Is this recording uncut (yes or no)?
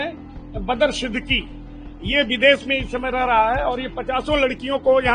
yes